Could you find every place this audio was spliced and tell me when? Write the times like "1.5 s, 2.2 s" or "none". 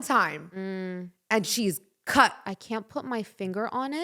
2.5 s